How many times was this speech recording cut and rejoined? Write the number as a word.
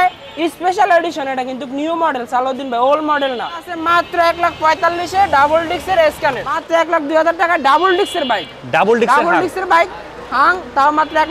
two